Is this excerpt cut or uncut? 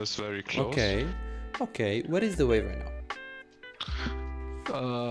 uncut